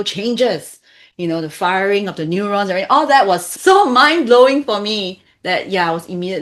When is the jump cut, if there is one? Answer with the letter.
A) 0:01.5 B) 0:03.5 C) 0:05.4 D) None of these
B